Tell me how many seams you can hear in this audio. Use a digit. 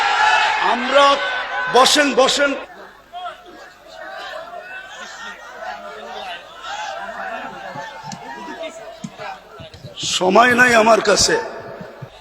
1